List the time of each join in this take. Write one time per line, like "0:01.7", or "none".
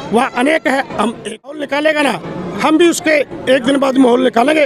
0:01.6